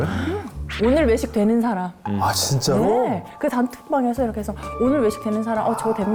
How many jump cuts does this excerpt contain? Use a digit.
0